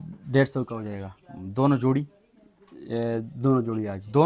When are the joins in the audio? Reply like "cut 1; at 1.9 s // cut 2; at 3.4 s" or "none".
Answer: none